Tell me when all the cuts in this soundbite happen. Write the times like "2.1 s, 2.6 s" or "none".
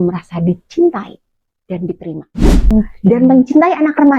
2.7 s